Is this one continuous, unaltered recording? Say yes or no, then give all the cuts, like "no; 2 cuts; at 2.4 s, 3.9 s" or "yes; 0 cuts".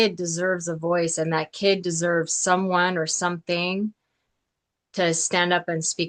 yes; 0 cuts